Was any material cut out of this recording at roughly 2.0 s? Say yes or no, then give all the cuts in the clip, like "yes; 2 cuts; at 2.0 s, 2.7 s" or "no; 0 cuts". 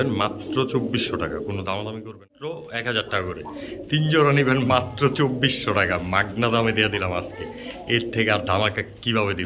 yes; 1 cut; at 2.0 s